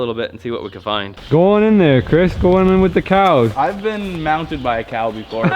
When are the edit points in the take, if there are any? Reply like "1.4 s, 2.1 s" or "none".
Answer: 1.2 s